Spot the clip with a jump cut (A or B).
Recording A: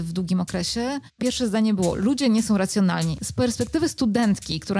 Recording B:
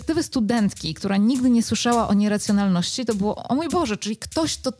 A